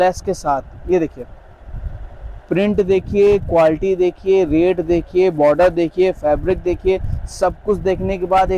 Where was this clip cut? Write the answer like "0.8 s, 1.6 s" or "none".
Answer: none